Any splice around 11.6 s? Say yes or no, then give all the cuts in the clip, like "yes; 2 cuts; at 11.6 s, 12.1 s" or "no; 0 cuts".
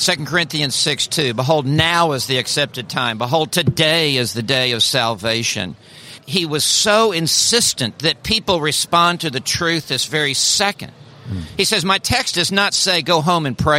no; 1 cut; at 6.3 s